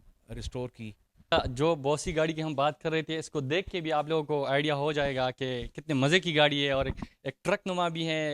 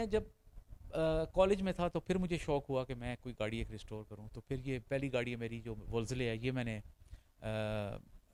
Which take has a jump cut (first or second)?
first